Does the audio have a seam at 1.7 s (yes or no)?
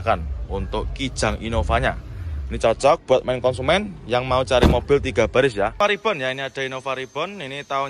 no